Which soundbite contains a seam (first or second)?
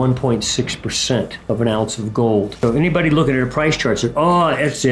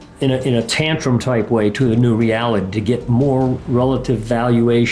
first